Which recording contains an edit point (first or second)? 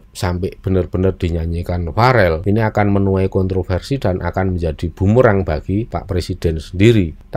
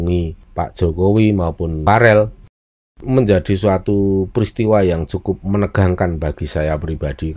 second